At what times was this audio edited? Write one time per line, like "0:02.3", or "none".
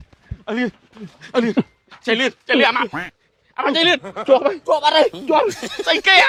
none